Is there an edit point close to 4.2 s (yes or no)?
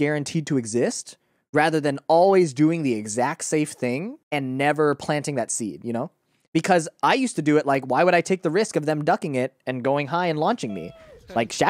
yes